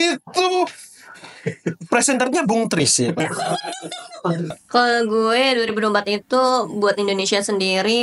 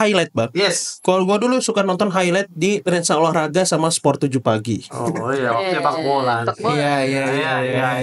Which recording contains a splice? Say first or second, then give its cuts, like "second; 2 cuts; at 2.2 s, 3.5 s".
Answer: first; 1 cut; at 4.6 s